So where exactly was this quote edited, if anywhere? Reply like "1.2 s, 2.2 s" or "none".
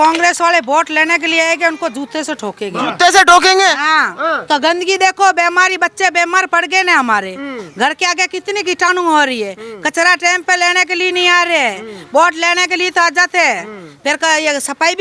none

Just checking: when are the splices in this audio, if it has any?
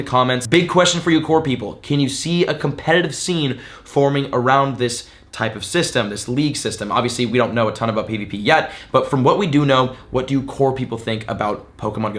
none

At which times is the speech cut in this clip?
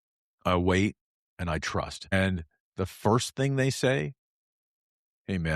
2.1 s

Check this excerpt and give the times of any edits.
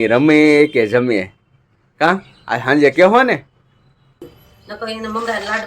4.2 s

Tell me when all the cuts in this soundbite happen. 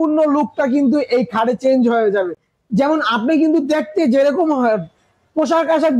none

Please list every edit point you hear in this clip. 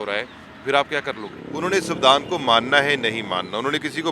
1.4 s

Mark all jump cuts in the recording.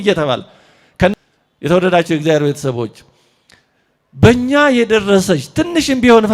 1.1 s

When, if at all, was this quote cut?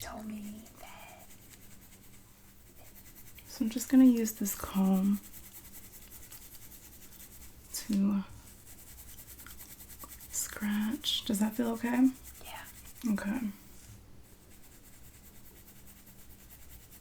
2.5 s

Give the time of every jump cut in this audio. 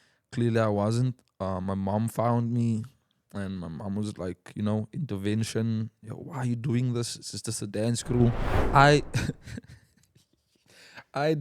8.5 s

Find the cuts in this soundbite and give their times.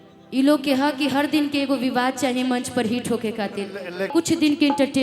4.0 s

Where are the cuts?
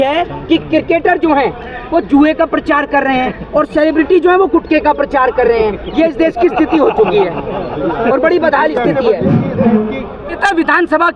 none

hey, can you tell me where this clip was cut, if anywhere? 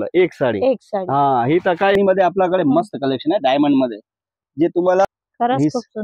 2.0 s, 5.1 s

